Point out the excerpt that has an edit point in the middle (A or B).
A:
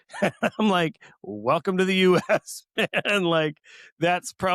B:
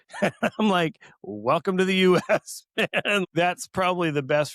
B